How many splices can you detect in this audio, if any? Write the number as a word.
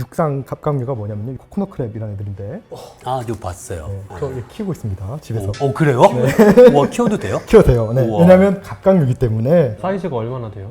one